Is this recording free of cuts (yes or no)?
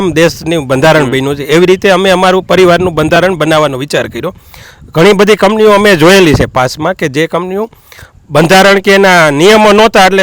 yes